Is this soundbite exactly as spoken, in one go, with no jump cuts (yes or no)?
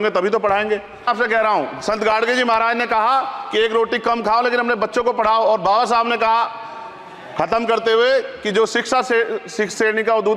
no